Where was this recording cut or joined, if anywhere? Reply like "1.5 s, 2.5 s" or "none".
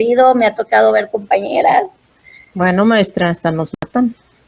none